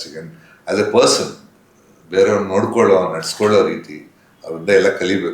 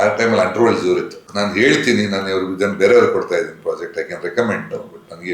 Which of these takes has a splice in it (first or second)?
second